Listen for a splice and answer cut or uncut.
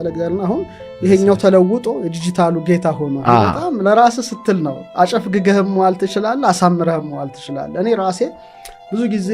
uncut